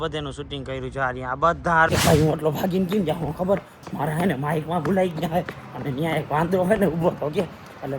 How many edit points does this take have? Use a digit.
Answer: 1